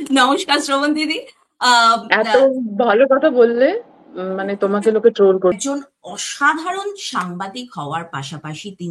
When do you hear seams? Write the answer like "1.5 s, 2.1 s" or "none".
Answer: 5.5 s